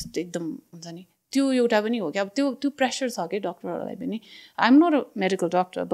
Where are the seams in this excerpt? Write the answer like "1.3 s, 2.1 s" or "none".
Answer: none